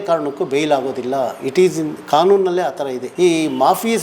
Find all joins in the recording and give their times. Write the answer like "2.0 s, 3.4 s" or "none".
3.0 s